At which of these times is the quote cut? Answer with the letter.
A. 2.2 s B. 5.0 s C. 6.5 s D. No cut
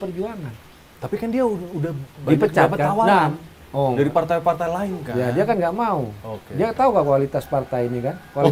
D